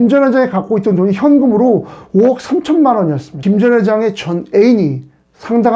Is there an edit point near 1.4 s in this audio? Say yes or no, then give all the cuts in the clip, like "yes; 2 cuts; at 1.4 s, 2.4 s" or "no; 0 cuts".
no; 1 cut; at 3.4 s